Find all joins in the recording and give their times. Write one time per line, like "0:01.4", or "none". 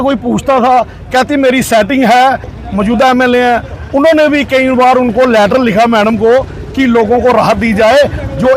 0:02.6

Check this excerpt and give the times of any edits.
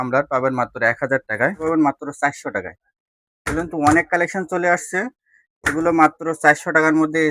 0:01.6

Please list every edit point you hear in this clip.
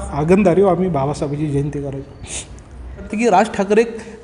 0:03.1

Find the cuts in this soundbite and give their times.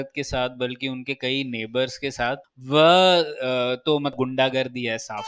0:04.1

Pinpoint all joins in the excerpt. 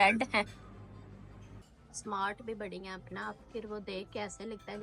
0:01.6

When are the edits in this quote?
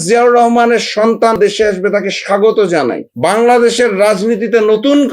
0:01.4
0:03.1

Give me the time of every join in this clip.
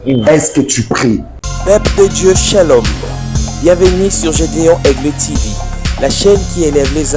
0:01.3

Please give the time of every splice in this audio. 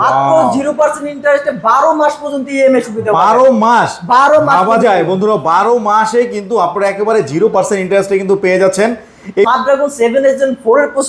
0:09.4

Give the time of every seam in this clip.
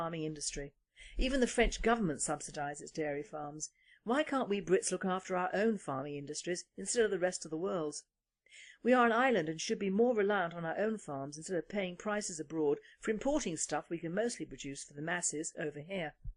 none

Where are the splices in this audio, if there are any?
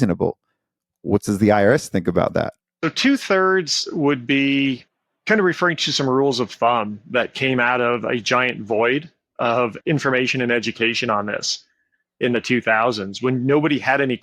0:02.6

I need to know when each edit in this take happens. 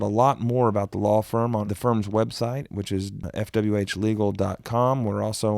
0:01.7
0:03.2

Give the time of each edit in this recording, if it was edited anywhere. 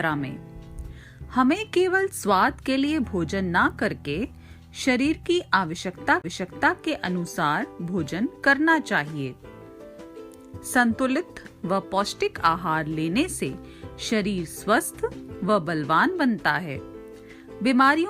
0:07.8

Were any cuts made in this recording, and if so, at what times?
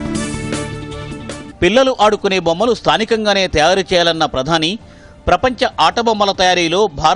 0:01.4

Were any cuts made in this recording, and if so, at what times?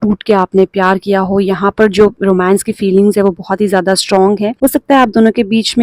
0:04.5

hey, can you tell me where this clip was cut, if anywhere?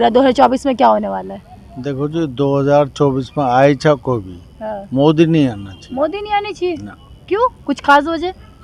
none

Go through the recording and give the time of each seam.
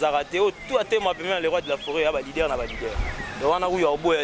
none

